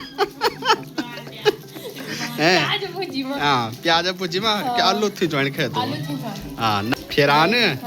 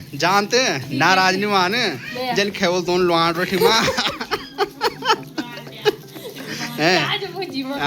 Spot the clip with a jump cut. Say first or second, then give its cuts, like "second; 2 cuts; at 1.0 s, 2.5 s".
first; 1 cut; at 6.9 s